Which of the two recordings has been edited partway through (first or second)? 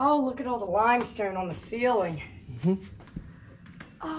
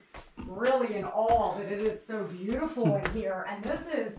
first